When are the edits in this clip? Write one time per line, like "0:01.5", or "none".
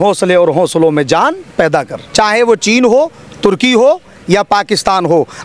0:02.0

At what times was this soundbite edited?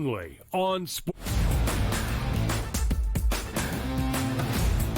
0:01.1

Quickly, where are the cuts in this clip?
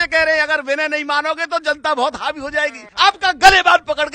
0:02.8

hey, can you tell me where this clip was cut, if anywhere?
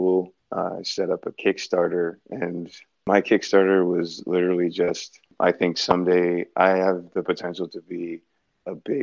0:03.0

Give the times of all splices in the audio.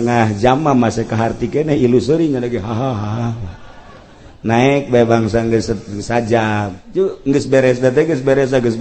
0:06.8

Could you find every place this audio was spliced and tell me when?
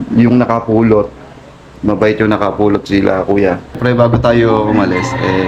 0:03.8

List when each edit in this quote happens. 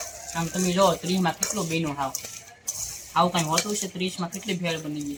none

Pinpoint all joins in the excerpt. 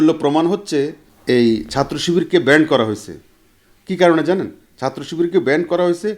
0:01.1

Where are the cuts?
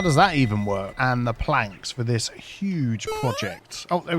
0:00.9

